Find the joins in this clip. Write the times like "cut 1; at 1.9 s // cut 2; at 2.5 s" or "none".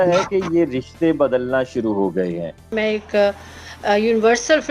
cut 1; at 2.7 s